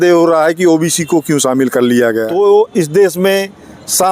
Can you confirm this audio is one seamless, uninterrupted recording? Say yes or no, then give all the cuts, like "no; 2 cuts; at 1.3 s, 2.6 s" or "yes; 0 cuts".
no; 1 cut; at 2.2 s